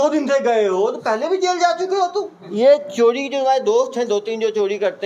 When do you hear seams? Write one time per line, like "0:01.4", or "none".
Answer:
0:02.4